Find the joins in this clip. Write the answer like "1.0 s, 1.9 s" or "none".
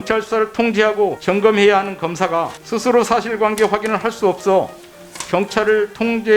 1.2 s, 2.6 s